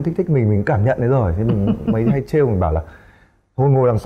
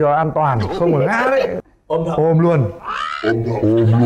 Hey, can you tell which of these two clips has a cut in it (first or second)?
second